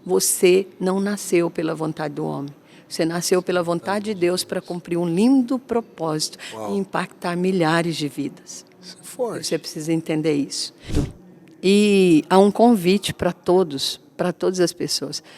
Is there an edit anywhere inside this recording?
yes; 1 cut; at 11.0 s

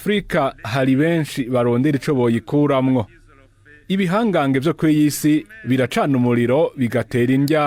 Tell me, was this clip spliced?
no; 0 cuts

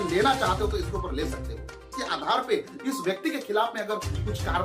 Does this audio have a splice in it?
yes; 1 cut; at 1.9 s

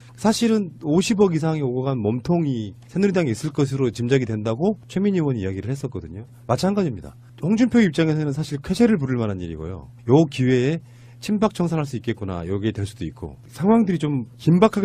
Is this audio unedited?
yes; 0 cuts

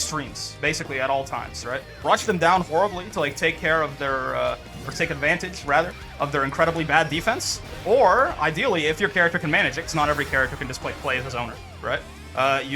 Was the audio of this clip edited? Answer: yes; 1 cut; at 2.0 s

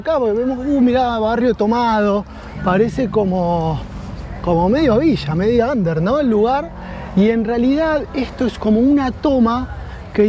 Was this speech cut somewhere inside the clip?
no; 0 cuts

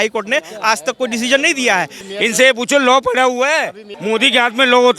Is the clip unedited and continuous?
no; 2 cuts; at 2.0 s, 3.9 s

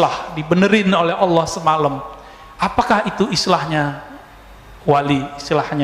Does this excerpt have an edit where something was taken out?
no; 0 cuts

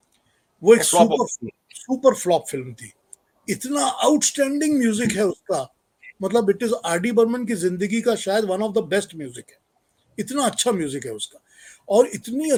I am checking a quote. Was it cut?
no; 0 cuts

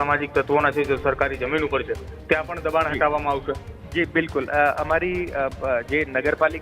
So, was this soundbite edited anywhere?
no; 0 cuts

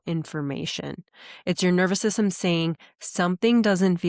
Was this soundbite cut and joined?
no; 0 cuts

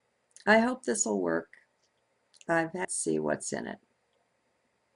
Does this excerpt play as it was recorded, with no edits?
yes; 0 cuts

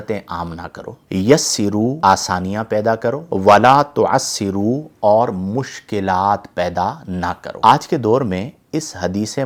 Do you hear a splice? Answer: no; 0 cuts

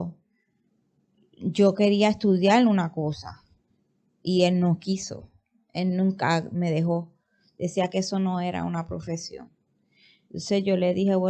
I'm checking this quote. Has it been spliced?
no; 0 cuts

